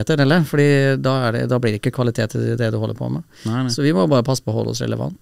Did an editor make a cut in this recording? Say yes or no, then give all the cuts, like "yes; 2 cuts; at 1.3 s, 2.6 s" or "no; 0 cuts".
no; 0 cuts